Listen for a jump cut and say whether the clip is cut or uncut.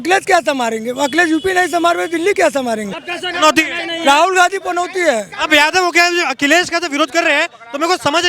cut